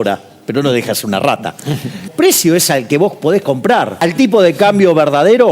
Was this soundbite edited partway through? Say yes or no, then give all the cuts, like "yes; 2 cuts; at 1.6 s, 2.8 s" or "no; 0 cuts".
yes; 2 cuts; at 2.1 s, 3.9 s